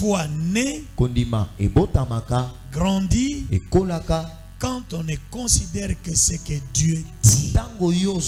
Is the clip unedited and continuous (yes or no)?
yes